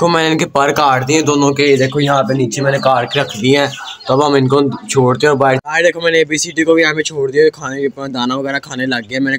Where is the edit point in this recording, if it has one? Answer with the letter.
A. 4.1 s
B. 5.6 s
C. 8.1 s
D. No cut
B